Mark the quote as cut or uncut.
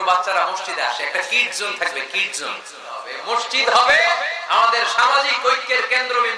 cut